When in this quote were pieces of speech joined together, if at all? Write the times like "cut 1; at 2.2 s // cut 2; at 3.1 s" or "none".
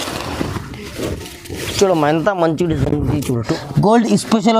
cut 1; at 3.5 s

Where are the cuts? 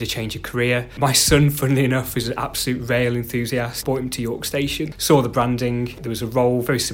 cut 1; at 3.8 s // cut 2; at 5.0 s // cut 3; at 6.1 s

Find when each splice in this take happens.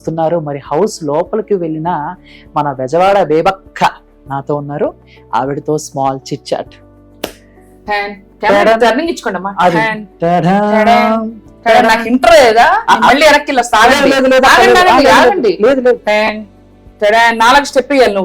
none

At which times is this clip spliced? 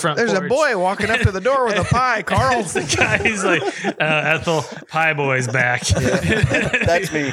none

